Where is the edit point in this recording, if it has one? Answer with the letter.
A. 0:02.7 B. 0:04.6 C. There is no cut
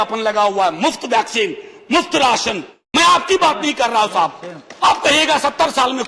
A